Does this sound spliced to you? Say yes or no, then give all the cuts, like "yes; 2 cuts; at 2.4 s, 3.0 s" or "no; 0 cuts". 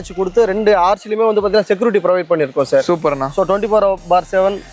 no; 0 cuts